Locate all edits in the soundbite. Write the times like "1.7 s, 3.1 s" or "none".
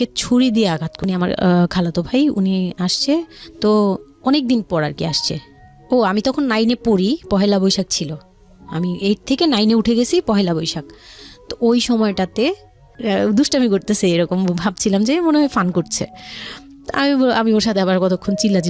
0.9 s, 12.9 s